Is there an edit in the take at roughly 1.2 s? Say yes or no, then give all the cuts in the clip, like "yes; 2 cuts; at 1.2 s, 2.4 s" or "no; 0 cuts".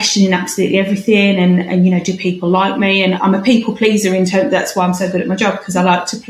no; 0 cuts